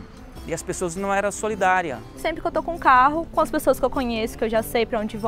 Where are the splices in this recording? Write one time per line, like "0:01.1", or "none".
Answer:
0:02.2

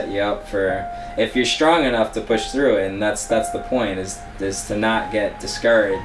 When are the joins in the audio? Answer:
none

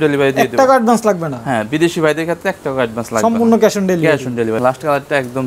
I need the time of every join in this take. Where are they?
0:04.6

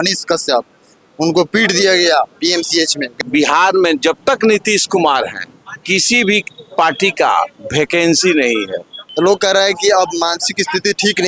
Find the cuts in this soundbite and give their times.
0:03.1
0:09.0

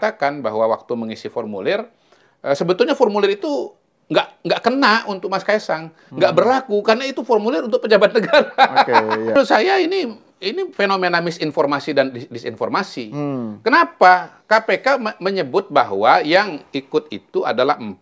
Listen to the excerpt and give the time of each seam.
0:09.4

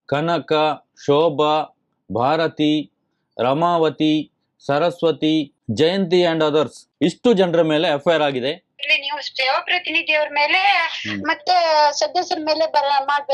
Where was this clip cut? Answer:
0:08.8

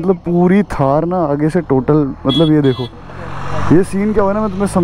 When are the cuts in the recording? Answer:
none

